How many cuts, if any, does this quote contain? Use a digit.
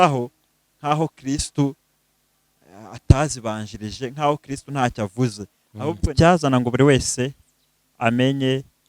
1